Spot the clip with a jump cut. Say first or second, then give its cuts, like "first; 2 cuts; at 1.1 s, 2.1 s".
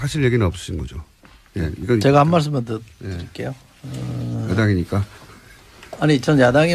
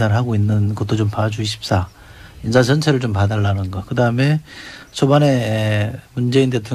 second; 1 cut; at 5.0 s